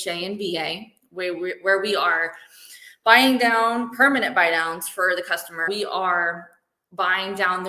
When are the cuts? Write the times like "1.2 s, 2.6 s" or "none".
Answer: 5.7 s